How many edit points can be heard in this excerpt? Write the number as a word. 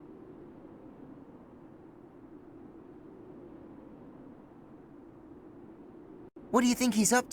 one